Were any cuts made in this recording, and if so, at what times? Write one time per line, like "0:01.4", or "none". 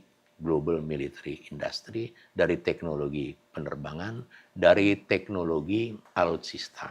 0:06.0